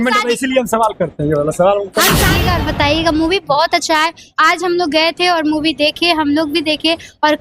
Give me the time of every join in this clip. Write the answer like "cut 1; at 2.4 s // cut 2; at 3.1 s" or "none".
cut 1; at 2.3 s